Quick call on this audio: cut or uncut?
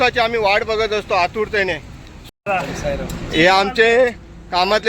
cut